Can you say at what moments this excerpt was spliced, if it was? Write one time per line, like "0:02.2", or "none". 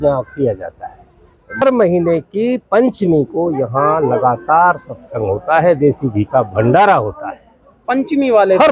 0:01.6